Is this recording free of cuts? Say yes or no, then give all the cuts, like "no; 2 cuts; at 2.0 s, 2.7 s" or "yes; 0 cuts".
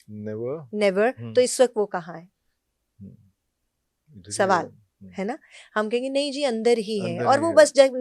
yes; 0 cuts